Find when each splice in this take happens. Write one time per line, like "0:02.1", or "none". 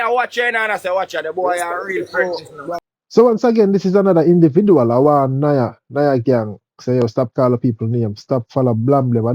none